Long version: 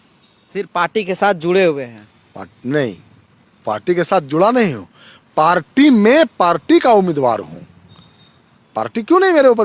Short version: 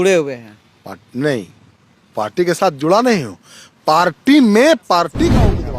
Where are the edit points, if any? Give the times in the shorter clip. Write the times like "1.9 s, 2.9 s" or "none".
none